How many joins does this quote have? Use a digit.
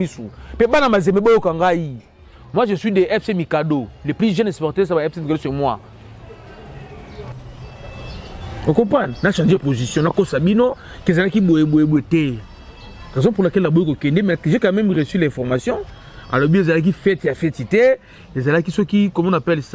1